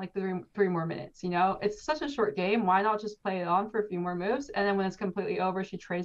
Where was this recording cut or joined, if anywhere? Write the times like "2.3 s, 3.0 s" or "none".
none